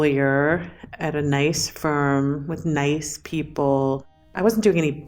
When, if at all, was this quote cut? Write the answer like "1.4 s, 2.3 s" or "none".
4.2 s